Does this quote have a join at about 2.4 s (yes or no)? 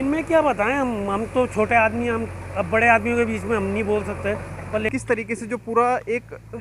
no